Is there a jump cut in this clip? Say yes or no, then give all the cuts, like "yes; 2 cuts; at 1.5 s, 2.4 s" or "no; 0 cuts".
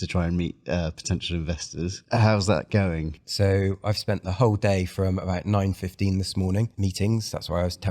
yes; 3 cuts; at 2.0 s, 3.2 s, 6.7 s